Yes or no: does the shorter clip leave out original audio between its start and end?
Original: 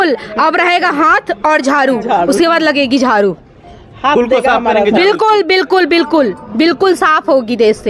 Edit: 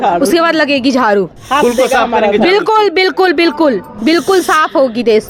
yes